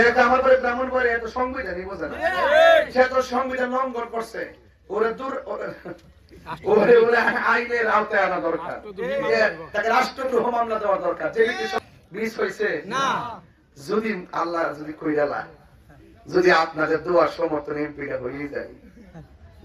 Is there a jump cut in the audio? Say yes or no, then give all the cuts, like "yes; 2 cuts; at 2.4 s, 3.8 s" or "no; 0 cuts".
yes; 1 cut; at 11.8 s